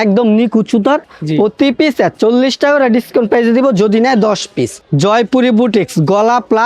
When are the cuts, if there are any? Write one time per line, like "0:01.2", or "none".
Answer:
0:01.1
0:04.8